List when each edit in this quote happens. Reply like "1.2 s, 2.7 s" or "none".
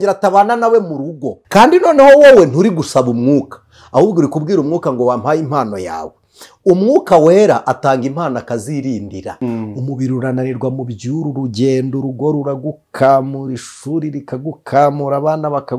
1.3 s, 9.3 s